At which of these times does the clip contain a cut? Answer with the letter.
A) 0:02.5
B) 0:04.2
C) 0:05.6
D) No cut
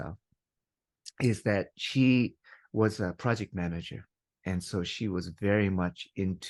D